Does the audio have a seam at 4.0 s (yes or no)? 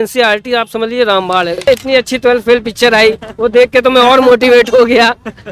no